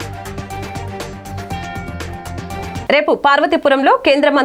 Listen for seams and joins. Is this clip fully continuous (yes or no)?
yes